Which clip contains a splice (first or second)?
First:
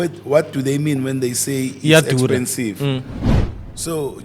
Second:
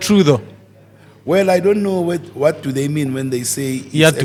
first